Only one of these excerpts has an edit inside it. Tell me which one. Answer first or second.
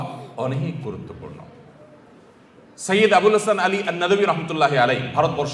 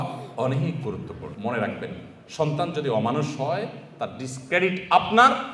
second